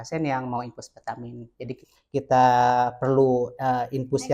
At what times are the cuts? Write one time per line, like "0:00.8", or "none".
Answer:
0:01.8